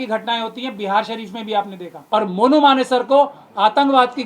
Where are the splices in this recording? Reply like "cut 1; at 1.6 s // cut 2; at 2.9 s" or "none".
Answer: cut 1; at 2.0 s